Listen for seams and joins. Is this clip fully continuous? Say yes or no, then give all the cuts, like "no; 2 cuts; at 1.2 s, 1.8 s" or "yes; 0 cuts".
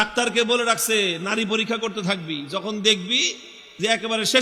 yes; 0 cuts